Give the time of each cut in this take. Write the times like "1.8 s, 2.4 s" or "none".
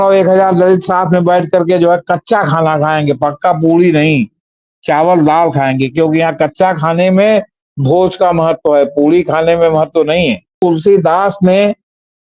10.6 s